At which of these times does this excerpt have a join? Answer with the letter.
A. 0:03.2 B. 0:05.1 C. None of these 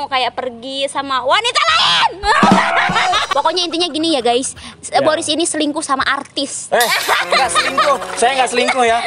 A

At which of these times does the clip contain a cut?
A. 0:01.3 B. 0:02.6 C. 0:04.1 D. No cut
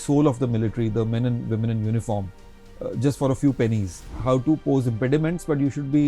C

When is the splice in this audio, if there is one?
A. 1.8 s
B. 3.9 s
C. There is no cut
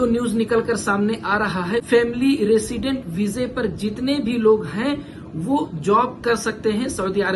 A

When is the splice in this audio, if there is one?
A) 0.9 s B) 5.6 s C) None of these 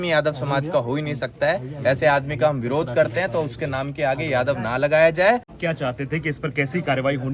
B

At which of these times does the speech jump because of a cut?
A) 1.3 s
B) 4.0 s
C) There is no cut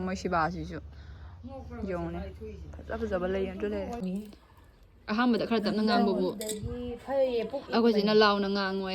B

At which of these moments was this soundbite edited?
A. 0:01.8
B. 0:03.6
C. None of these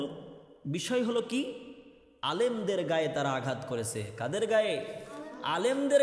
C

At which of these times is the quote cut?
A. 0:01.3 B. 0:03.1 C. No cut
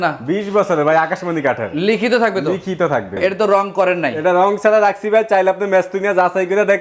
B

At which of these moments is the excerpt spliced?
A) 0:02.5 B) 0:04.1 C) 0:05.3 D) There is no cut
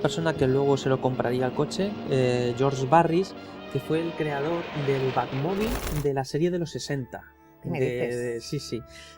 A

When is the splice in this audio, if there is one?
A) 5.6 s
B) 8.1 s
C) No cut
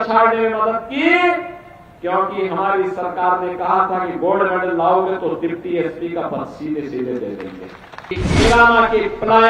B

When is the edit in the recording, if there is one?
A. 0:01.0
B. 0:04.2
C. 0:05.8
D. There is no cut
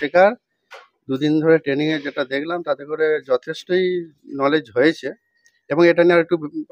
D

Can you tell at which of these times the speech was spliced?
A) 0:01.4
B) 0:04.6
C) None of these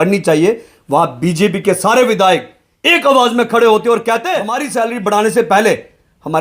B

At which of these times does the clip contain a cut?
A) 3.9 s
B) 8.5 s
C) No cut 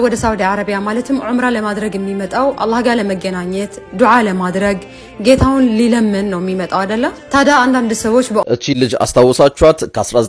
B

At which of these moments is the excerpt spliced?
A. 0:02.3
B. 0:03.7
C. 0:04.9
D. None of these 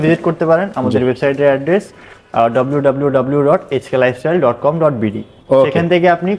D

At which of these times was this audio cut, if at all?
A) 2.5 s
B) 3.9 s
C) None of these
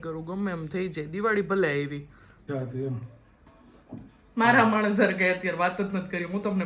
A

